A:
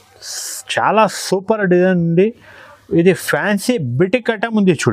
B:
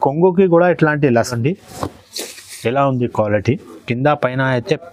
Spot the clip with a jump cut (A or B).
B